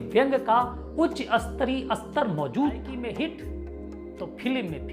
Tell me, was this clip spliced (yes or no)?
yes